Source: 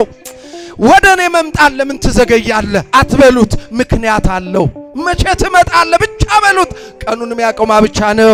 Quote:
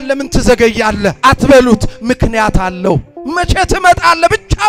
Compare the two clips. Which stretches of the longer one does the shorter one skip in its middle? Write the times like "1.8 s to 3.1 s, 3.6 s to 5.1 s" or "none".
none